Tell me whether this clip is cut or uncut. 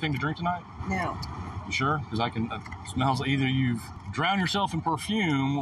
cut